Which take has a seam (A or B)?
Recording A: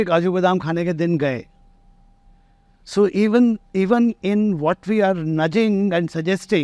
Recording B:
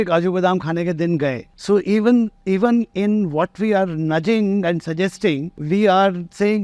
B